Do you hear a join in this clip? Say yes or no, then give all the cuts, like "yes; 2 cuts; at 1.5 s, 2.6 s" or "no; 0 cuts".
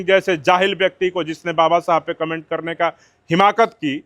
no; 0 cuts